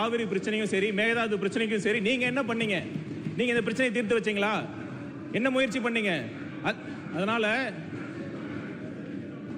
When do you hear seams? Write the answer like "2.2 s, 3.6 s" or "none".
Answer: none